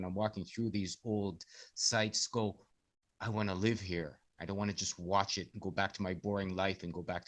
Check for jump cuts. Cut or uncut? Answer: uncut